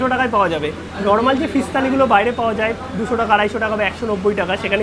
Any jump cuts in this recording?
no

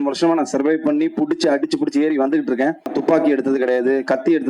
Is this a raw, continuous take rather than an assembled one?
no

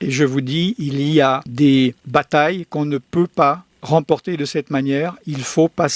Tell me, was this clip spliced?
no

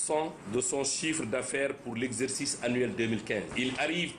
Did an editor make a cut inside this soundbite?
no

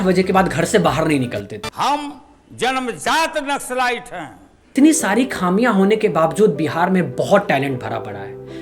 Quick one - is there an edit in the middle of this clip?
yes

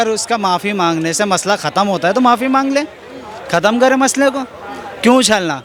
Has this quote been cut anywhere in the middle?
no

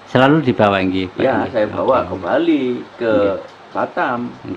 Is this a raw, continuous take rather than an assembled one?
no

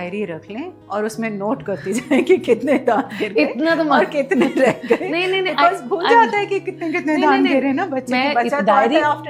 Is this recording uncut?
yes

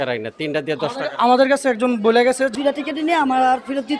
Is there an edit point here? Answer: yes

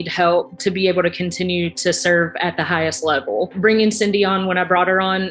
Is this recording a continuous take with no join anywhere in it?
no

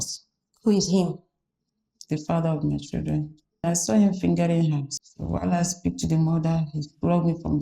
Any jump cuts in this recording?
yes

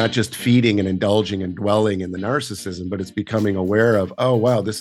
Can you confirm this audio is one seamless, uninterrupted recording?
yes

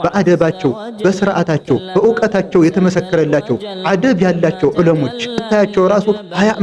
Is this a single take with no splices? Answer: yes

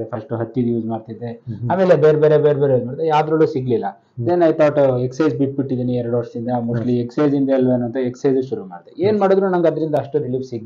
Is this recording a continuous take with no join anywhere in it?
yes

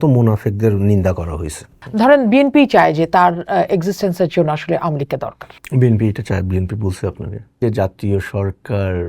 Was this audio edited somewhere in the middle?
yes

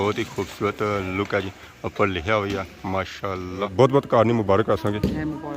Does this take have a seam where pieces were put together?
yes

